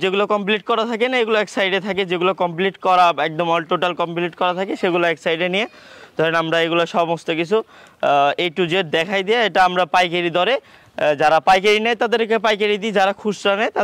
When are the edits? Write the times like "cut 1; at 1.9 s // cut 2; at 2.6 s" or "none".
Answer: none